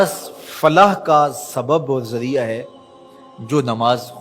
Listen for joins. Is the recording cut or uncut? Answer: uncut